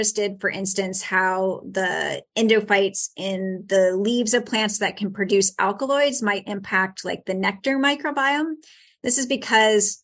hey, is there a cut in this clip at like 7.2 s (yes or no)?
no